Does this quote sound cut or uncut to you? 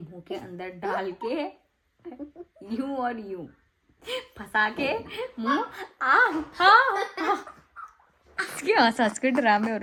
uncut